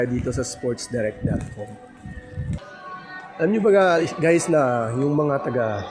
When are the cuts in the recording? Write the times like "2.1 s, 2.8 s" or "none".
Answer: 2.6 s

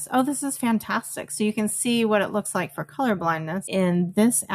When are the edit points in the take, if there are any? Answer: 3.6 s

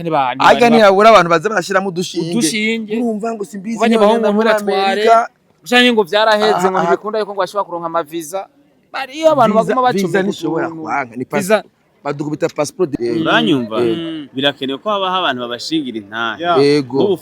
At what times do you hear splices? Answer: 13.0 s

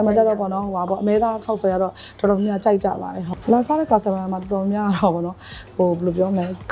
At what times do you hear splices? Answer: 3.3 s

